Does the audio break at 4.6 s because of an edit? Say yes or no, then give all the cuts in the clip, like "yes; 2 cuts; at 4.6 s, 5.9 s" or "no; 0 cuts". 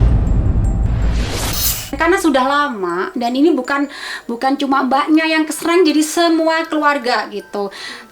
no; 1 cut; at 1.9 s